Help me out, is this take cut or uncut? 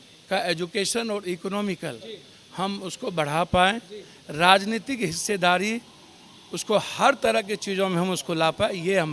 uncut